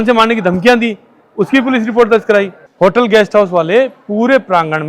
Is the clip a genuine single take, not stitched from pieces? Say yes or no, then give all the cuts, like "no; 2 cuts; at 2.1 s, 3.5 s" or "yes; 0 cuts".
no; 1 cut; at 2.6 s